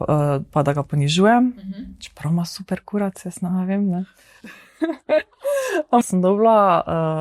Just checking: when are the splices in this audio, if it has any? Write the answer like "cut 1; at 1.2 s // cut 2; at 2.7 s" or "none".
cut 1; at 6.0 s